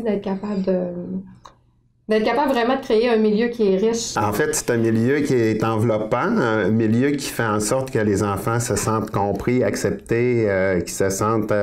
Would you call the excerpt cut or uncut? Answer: cut